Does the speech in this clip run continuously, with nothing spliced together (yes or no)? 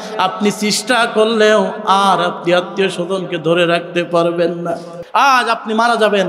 no